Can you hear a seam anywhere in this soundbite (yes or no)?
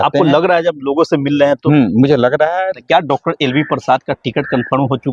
yes